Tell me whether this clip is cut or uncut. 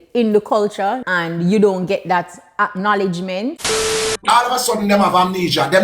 cut